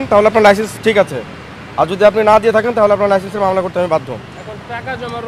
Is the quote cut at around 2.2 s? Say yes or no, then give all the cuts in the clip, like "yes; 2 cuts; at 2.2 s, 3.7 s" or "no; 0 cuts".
no; 0 cuts